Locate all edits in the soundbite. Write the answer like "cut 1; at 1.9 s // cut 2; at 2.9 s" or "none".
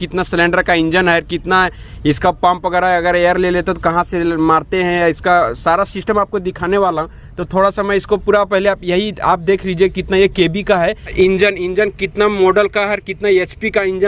cut 1; at 11.1 s